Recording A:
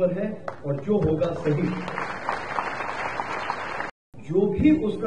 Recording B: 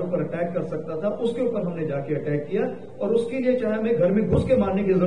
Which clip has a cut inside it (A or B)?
A